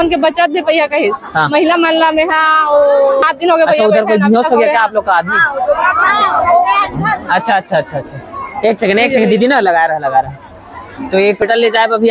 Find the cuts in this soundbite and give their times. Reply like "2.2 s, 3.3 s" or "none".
3.2 s, 11.4 s